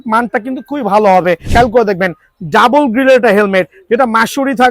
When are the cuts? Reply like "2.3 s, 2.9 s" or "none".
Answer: 1.5 s